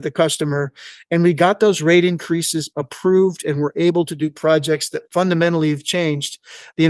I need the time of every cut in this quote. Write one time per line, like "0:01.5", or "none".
none

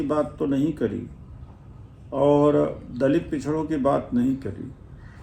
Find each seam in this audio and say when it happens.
none

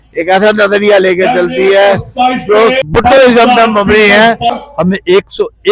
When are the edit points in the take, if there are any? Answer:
0:02.8
0:04.5

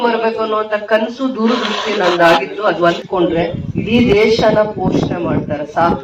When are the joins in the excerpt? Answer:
0:03.0

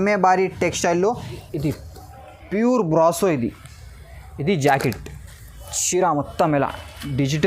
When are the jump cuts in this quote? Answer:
0:01.5

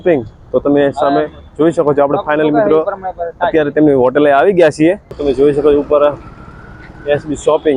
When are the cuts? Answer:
0:05.1

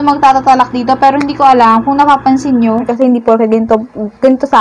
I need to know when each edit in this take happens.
0:02.9

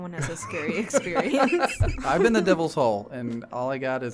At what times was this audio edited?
0:01.9

